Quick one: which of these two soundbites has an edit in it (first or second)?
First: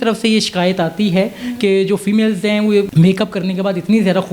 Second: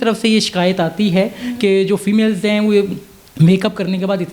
first